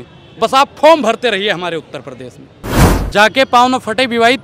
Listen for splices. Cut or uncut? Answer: cut